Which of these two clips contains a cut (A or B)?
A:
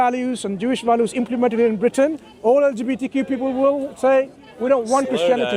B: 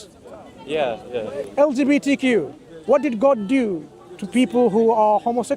B